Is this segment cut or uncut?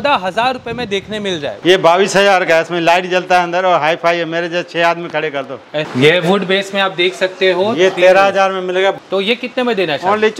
cut